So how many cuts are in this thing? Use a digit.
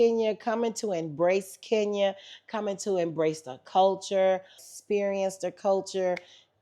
1